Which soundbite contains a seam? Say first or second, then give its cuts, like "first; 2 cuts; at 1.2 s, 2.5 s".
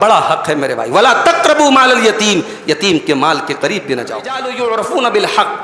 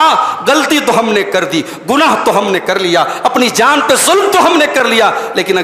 first; 1 cut; at 4.5 s